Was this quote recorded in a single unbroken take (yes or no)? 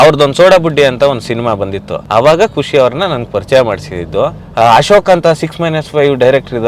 no